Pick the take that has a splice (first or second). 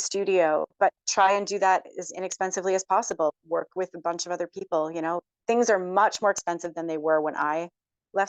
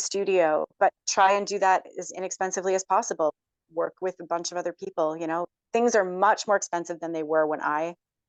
first